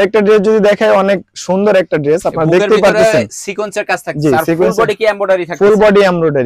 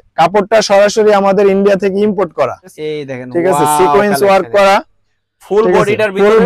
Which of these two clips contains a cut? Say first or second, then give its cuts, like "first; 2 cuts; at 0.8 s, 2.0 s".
second; 1 cut; at 2.8 s